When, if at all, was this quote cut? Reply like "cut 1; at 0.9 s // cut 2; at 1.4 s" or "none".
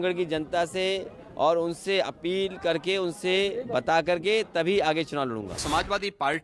cut 1; at 5.5 s